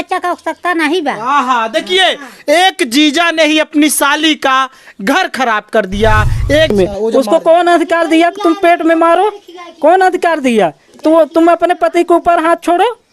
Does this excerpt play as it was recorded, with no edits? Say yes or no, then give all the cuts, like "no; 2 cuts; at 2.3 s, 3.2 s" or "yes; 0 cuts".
no; 1 cut; at 6.7 s